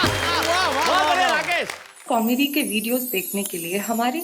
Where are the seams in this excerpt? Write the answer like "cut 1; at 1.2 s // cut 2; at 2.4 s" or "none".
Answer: cut 1; at 1.9 s